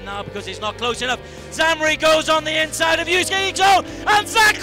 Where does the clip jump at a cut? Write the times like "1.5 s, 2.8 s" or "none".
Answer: none

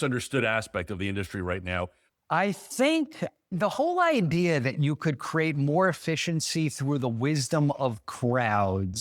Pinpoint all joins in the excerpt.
2.0 s, 3.5 s

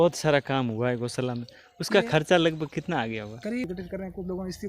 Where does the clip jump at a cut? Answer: 3.6 s

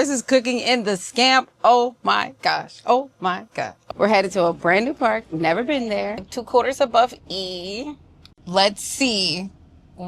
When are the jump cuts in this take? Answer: 3.8 s, 6.2 s

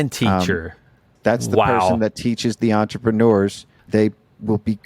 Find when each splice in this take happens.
1.1 s, 3.8 s

